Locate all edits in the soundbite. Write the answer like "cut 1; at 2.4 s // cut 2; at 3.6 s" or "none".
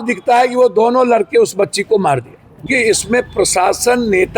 cut 1; at 2.6 s